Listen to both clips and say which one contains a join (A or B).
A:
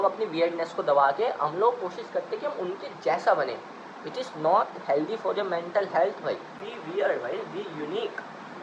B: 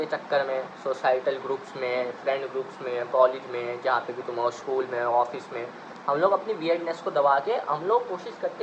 A